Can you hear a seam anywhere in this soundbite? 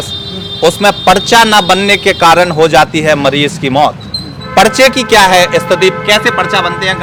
no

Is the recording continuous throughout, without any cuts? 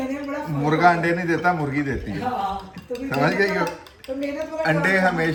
yes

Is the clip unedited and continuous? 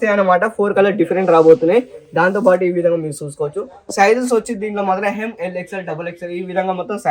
yes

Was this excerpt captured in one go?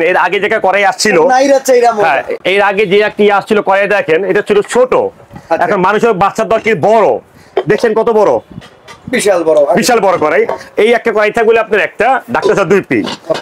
yes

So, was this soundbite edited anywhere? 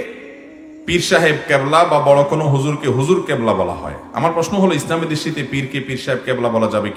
no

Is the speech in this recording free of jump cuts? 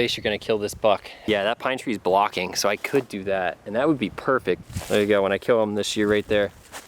no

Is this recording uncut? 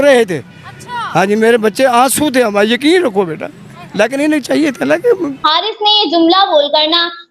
no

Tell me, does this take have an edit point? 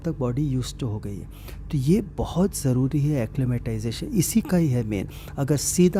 no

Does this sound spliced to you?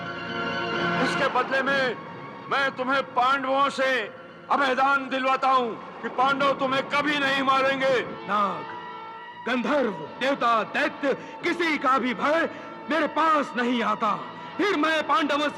yes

